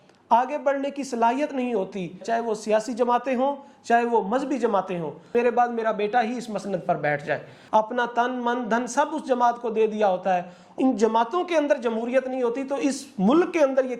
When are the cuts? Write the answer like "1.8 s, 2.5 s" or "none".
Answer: 2.2 s, 5.3 s, 7.5 s, 10.6 s